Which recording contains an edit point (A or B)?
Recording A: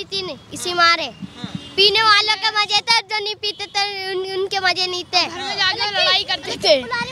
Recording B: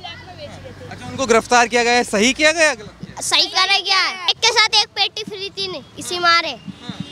B